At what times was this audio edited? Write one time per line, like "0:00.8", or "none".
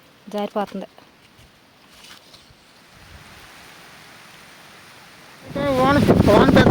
0:02.8

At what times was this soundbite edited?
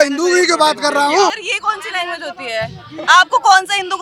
0:01.4

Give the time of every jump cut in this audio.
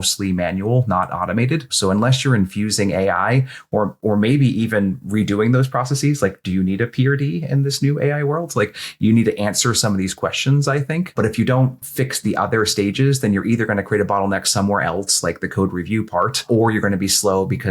0:01.7
0:11.1
0:16.4

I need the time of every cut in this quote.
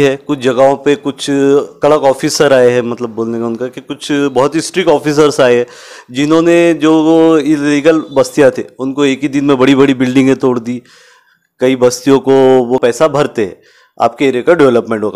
0:12.8

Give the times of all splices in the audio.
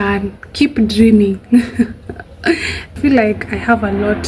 0:03.0

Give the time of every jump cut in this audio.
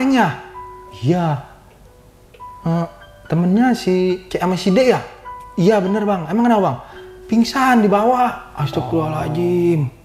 none

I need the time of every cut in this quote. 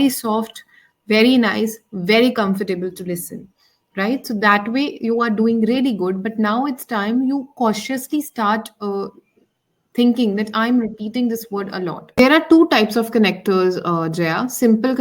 0:12.2

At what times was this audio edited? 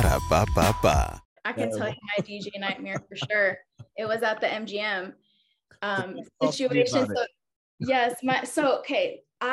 0:01.4

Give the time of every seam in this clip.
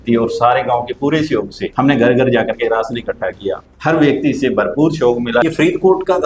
0:01.6
0:03.7
0:05.4

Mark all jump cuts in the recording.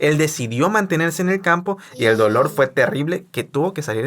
0:01.6

